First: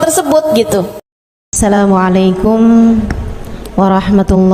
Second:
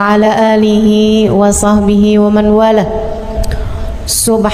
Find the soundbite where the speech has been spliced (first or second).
first